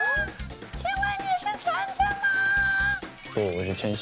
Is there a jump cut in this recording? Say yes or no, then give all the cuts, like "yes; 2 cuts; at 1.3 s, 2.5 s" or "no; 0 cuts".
no; 0 cuts